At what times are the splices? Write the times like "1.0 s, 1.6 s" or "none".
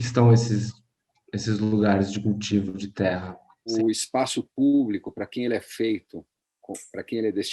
3.7 s